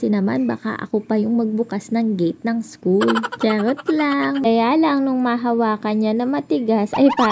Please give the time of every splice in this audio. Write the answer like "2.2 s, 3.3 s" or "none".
4.4 s